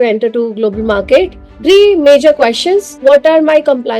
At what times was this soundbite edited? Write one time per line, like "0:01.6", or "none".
0:01.4
0:02.9